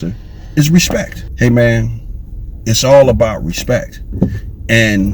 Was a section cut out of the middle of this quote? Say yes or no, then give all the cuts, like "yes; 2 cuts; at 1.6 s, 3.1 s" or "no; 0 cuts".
yes; 1 cut; at 1.2 s